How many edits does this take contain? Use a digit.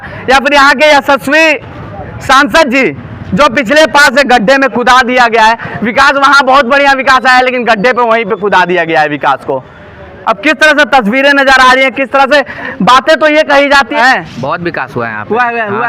2